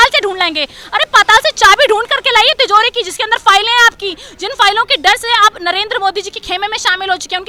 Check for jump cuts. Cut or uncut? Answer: uncut